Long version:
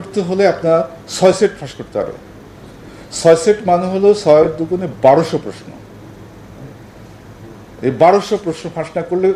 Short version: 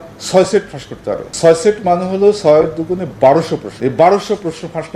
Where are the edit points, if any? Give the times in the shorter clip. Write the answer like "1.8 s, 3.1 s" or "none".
1.3 s, 3.7 s